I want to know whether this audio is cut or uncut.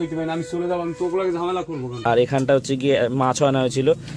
cut